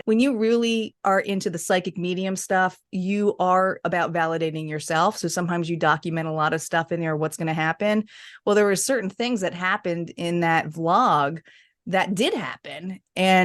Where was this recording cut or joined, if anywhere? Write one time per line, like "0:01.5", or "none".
0:00.9